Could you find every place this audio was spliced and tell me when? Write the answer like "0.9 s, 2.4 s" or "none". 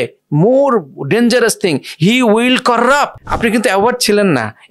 3.2 s